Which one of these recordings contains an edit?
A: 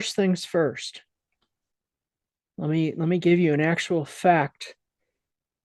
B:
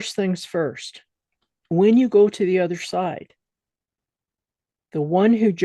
B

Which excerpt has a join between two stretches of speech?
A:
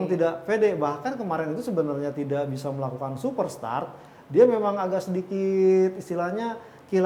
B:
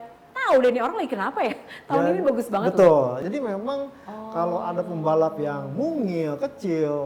B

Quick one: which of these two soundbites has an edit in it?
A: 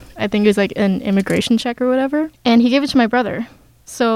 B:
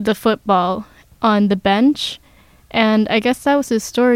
A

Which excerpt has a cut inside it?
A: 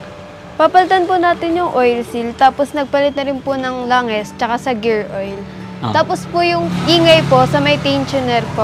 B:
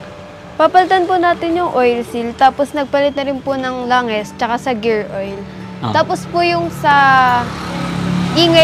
A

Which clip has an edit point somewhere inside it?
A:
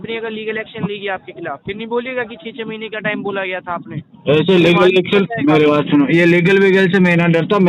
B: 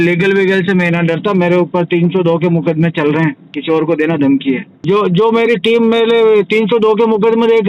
B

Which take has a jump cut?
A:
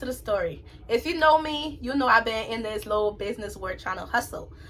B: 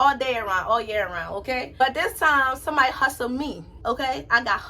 B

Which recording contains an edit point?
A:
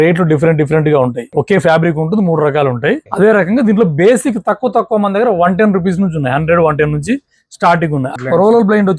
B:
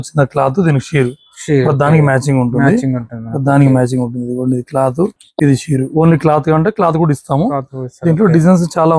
A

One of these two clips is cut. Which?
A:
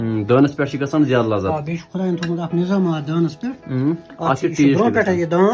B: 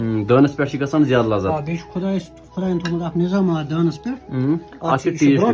A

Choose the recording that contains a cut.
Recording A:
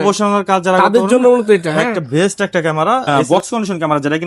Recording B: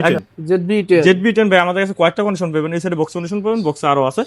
A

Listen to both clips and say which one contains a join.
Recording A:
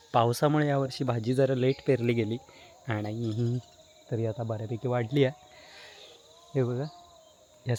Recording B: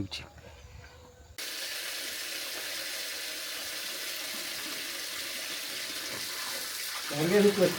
B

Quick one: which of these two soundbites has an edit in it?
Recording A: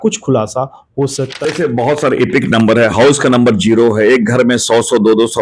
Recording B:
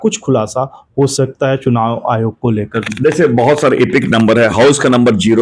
A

